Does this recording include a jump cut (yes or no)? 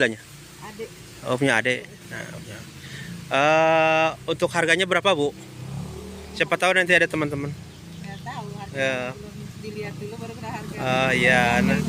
no